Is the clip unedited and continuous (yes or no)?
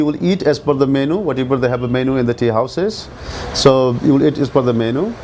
yes